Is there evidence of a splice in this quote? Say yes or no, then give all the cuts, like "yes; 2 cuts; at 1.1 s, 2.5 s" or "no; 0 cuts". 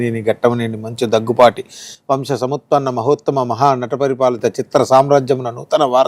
no; 0 cuts